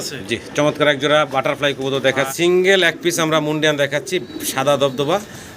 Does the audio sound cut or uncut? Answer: cut